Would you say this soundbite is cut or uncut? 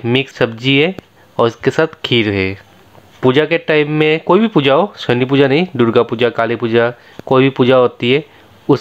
uncut